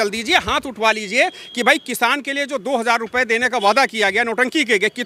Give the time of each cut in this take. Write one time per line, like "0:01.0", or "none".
none